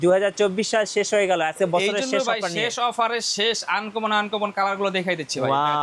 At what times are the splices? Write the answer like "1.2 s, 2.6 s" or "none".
none

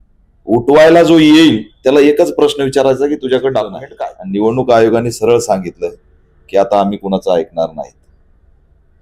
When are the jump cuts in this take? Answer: 3.9 s

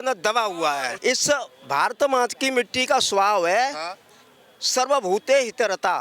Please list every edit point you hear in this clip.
0.9 s

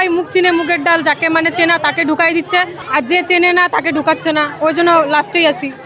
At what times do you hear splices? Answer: 2.8 s, 4.5 s

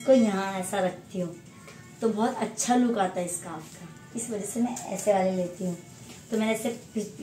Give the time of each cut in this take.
none

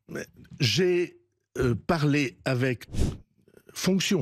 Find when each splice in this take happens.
2.9 s

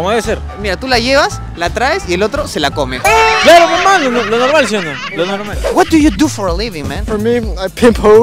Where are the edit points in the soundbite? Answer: 5.6 s

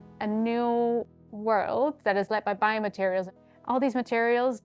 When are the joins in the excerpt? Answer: 3.3 s

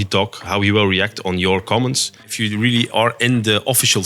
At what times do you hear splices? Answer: 2.2 s

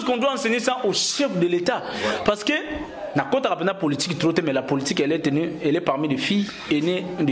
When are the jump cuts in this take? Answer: none

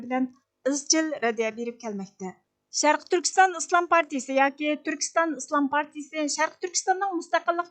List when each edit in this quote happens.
2.7 s

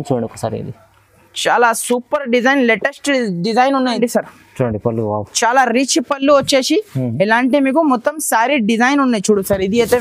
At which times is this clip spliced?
4.0 s

